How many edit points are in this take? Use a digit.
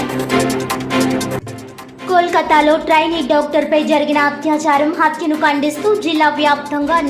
1